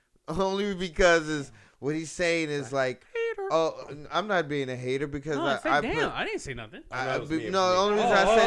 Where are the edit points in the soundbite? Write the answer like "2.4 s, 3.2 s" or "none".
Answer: none